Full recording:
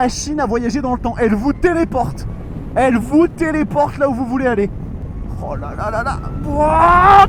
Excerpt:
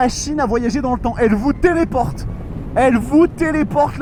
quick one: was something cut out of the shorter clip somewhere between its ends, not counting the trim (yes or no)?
no